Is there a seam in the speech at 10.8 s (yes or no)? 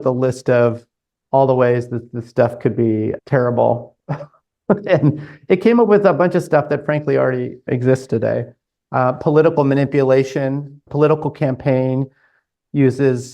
yes